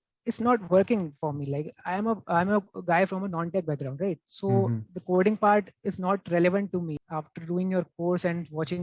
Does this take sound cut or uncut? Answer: cut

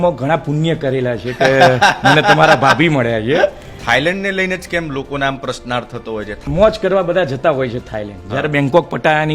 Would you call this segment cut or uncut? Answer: cut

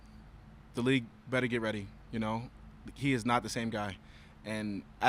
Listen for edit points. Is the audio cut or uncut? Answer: uncut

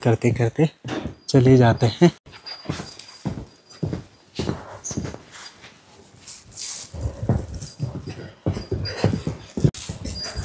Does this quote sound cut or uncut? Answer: uncut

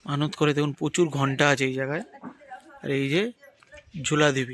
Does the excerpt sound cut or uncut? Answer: uncut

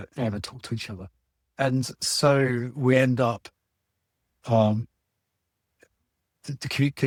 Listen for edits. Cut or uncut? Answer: uncut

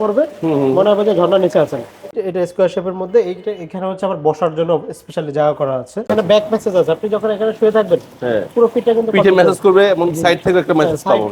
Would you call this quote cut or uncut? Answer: cut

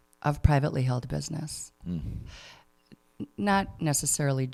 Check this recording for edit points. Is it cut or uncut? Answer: uncut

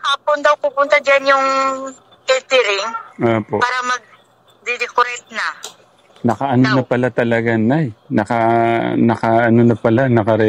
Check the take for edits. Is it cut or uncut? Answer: cut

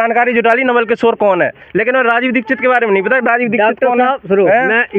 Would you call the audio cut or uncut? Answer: uncut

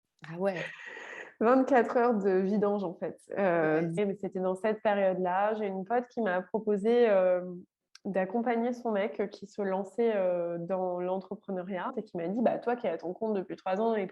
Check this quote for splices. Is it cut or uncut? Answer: cut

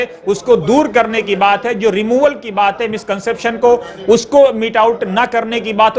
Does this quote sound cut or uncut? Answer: uncut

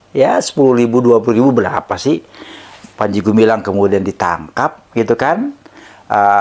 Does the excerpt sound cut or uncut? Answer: uncut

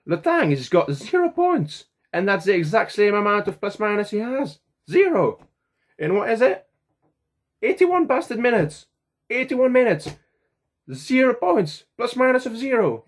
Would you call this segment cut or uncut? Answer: uncut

